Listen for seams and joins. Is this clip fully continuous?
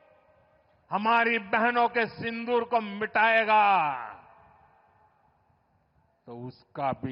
yes; 0 cuts

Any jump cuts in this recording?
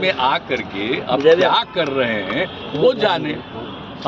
no; 0 cuts

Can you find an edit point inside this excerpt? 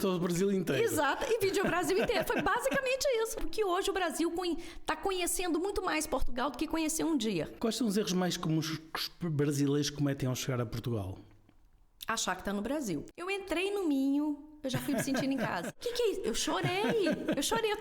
yes; 4 cuts; at 3.4 s, 7.5 s, 13.1 s, 15.7 s

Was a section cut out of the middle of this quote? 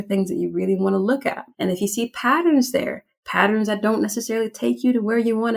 yes; 1 cut; at 1.5 s

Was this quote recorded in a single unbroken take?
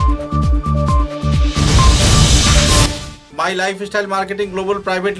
no; 1 cut; at 2.9 s

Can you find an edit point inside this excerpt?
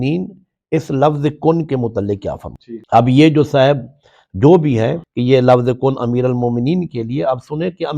no; 0 cuts

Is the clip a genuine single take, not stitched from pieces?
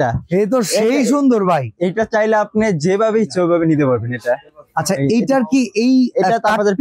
yes; 0 cuts

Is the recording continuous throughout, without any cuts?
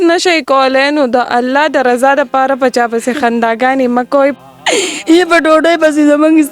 no; 1 cut; at 4.3 s

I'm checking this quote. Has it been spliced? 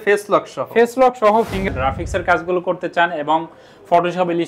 yes; 1 cut; at 1.7 s

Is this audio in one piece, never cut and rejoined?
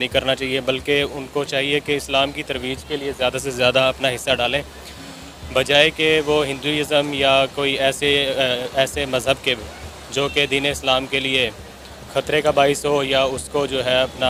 yes; 0 cuts

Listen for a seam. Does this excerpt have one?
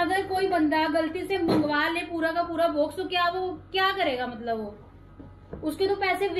no; 0 cuts

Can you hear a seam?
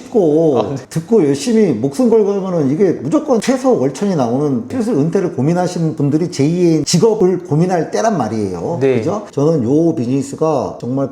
yes; 3 cuts; at 3.4 s, 4.7 s, 6.9 s

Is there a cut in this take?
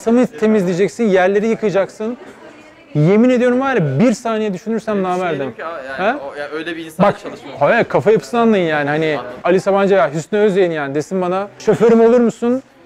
yes; 2 cuts; at 9.4 s, 11.6 s

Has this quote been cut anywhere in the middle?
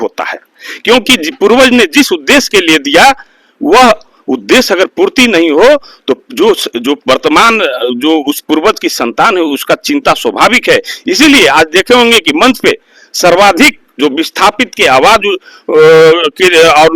no; 0 cuts

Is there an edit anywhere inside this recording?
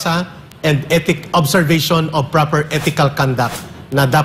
no; 0 cuts

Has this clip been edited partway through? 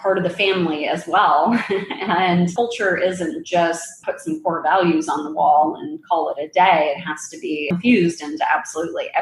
yes; 1 cut; at 7.7 s

